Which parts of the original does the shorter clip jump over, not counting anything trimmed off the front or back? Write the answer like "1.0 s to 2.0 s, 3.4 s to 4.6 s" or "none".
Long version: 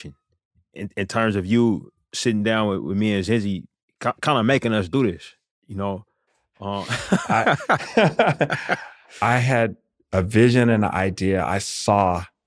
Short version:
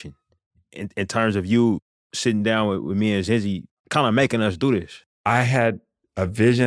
3.9 s to 4.2 s, 5.3 s to 9.0 s

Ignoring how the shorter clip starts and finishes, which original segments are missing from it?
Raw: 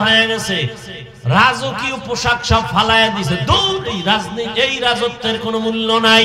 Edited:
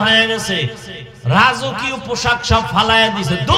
none

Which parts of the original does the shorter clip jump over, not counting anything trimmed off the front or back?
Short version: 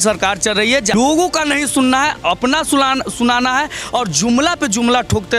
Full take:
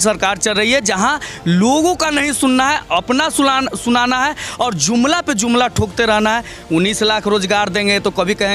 0.9 s to 1.6 s

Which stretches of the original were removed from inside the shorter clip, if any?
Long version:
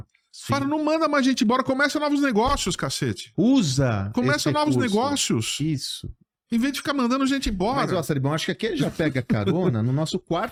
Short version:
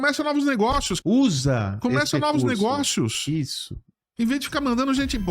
2.7 s to 3.3 s

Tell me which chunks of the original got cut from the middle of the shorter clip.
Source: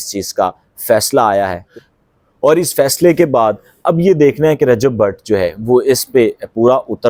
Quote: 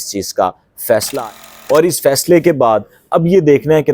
1.1 s to 1.9 s

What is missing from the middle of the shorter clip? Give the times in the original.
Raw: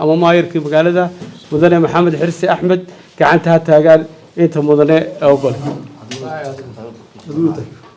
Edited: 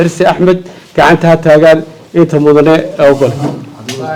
none

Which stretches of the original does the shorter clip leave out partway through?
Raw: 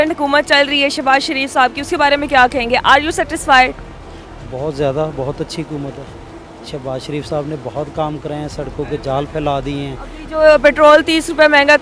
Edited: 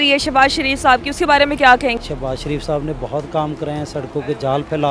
2.7 s to 6.6 s

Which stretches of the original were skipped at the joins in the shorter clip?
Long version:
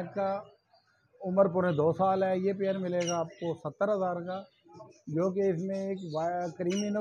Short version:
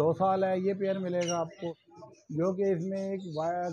3.6 s to 4.6 s

